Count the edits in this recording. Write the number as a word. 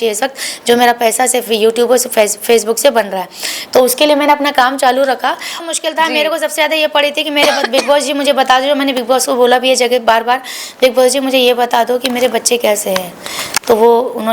one